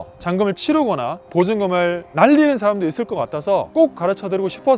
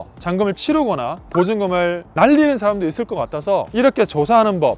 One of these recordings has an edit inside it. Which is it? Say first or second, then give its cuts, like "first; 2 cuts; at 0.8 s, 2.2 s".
first; 1 cut; at 3.7 s